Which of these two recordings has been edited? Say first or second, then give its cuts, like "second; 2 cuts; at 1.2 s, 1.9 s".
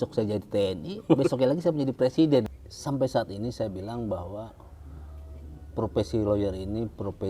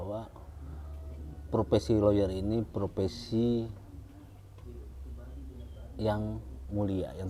first; 1 cut; at 2.6 s